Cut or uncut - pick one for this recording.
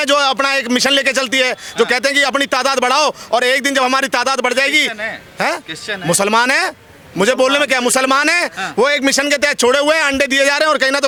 uncut